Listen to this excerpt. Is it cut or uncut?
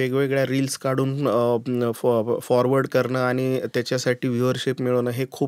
uncut